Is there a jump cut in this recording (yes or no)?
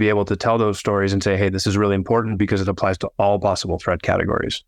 no